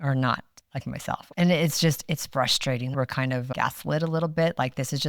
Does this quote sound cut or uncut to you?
cut